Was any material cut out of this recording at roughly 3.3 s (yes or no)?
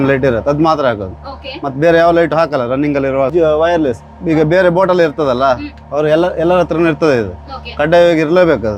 yes